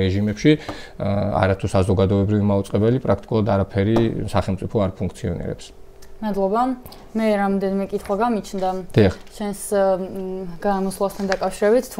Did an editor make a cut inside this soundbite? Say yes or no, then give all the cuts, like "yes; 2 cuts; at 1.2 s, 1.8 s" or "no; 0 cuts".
no; 0 cuts